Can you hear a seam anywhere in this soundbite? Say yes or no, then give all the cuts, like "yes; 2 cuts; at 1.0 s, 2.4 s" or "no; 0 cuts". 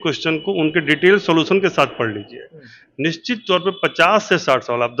no; 0 cuts